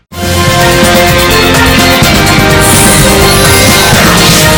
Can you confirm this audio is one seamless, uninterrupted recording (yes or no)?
yes